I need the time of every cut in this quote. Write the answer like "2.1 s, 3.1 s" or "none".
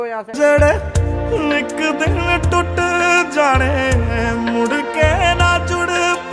none